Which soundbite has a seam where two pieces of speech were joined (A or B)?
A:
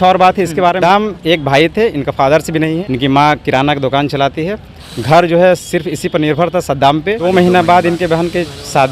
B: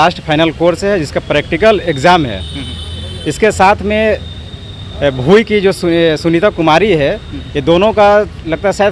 A